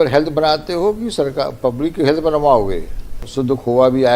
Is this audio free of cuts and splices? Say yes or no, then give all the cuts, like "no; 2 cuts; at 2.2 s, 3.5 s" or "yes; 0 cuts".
no; 1 cut; at 3.2 s